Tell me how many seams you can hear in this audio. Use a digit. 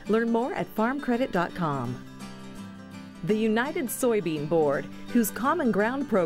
0